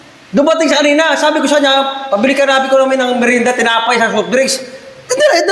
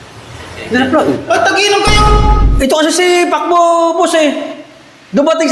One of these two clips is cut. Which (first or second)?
second